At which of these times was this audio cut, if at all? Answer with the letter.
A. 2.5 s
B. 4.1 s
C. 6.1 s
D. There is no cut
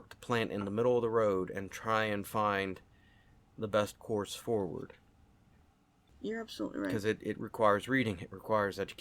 C